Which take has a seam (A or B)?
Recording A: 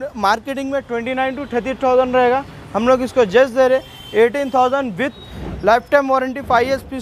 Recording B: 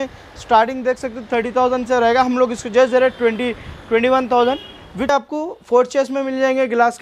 B